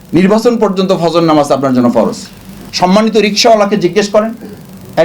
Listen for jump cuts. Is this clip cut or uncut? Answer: cut